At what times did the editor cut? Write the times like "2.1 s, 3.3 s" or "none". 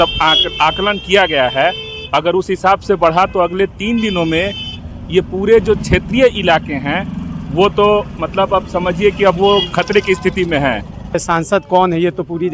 11.2 s